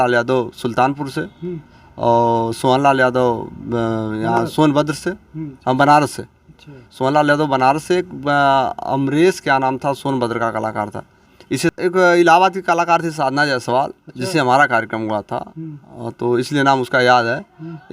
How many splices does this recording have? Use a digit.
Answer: 1